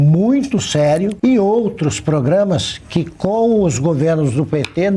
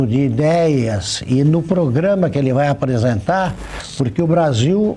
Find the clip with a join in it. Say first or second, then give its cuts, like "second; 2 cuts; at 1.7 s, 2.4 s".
first; 1 cut; at 1.1 s